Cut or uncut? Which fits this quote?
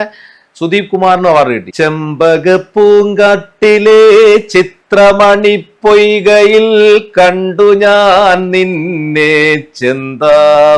cut